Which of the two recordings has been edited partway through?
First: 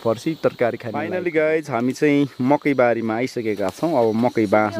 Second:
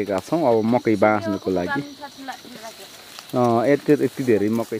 first; 1 cut; at 1.0 s

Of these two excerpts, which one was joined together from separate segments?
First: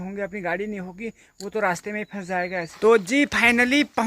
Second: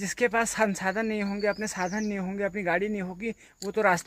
first; 1 cut; at 2.8 s

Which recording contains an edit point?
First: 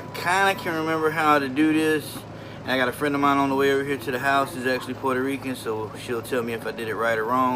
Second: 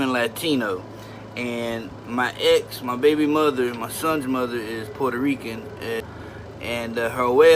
second; 1 cut; at 6.0 s

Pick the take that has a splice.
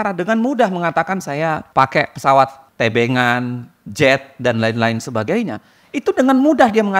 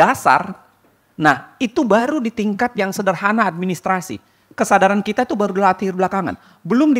first; 2 cuts; at 1.6 s, 2.6 s

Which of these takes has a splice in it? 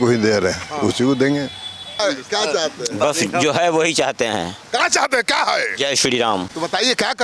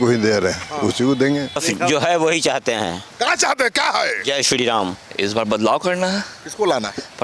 second; 2 cuts; at 1.6 s, 5.0 s

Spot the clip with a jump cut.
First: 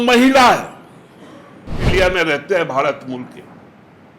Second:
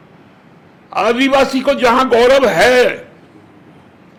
first; 1 cut; at 1.9 s

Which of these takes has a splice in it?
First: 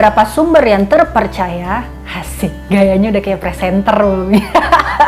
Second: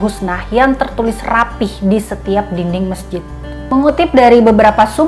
second; 1 cut; at 3.6 s

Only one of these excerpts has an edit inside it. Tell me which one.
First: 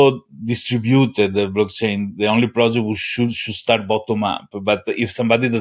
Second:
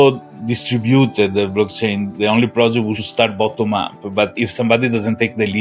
second; 2 cuts; at 3.0 s, 4.3 s

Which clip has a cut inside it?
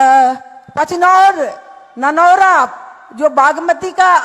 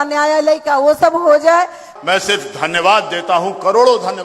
second; 1 cut; at 1.8 s

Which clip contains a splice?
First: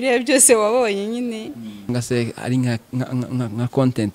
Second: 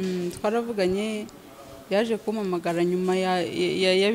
first; 1 cut; at 1.9 s

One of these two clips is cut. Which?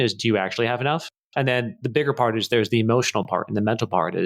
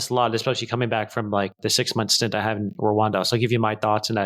first; 1 cut; at 1.2 s

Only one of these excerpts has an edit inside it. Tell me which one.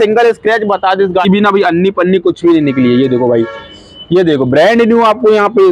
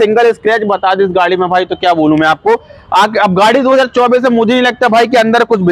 first; 1 cut; at 1.2 s

